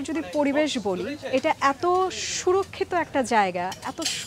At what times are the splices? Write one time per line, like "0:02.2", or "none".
none